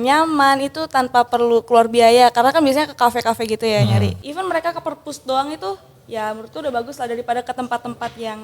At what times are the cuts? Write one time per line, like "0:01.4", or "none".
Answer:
0:04.2